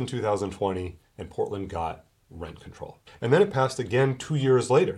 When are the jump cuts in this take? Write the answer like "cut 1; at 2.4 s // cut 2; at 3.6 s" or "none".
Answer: cut 1; at 3.1 s